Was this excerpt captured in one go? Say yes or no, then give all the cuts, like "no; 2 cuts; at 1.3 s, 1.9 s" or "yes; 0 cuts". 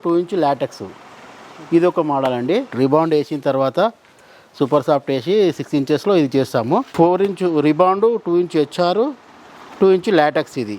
no; 2 cuts; at 2.7 s, 6.9 s